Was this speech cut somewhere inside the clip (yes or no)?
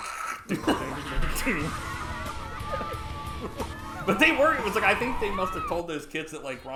no